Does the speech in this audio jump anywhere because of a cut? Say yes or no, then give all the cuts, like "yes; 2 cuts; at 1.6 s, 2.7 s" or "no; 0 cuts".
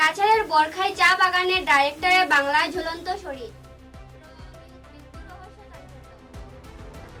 no; 0 cuts